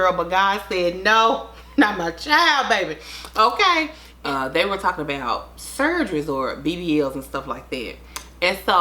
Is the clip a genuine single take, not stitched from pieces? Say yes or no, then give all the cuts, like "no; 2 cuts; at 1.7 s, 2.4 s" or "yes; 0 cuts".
no; 1 cut; at 4.0 s